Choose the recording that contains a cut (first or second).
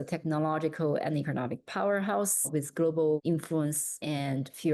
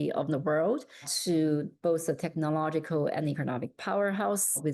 first